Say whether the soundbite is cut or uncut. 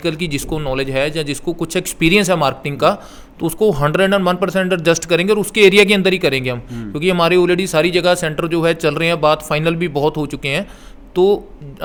uncut